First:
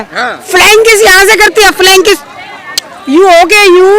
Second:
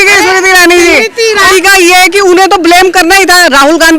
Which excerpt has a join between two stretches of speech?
second; 1 cut; at 1.5 s

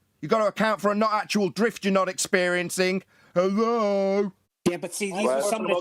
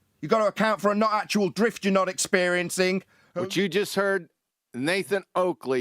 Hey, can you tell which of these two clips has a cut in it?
second; 1 cut; at 3.2 s

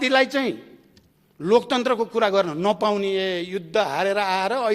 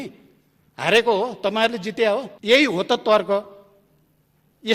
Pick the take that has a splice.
second; 1 cut; at 2.3 s

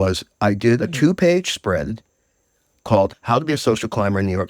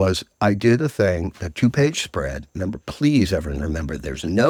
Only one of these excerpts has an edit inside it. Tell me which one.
first; 2 cuts; at 0.8 s, 3.1 s

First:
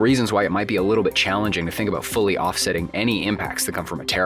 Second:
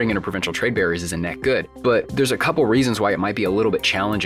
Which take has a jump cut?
second; 1 cut; at 1.7 s

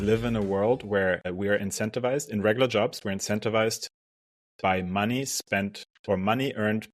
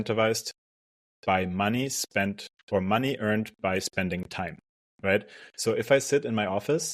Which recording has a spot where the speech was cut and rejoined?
first; 1 cut; at 1.3 s

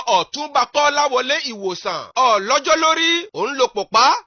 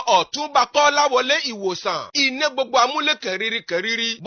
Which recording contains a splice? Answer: second; 1 cut; at 2.0 s

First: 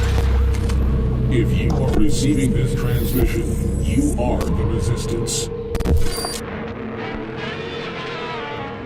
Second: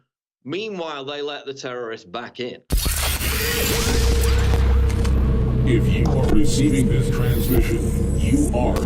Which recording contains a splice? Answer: second; 1 cut; at 3.0 s

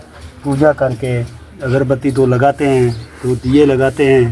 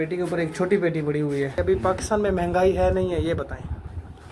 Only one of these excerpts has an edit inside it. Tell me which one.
second; 1 cut; at 1.6 s

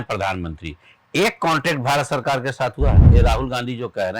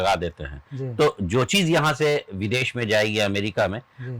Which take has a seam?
first; 1 cut; at 3.1 s

